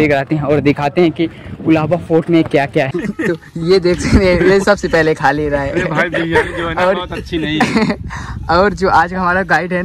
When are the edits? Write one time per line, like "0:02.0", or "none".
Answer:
0:02.9